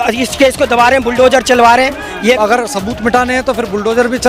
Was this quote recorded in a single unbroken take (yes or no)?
no